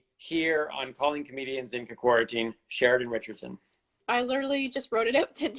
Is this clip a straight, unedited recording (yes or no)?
no